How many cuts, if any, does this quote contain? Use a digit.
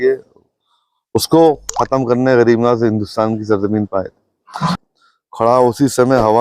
1